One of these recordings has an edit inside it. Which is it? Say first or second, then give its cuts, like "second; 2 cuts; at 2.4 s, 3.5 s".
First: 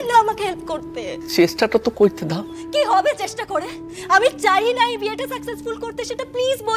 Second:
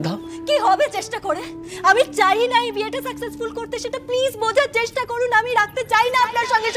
first; 1 cut; at 1.2 s